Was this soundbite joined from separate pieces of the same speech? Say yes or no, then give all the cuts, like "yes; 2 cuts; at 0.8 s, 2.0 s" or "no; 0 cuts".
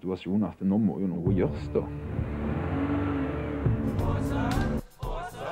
yes; 2 cuts; at 1.2 s, 4.8 s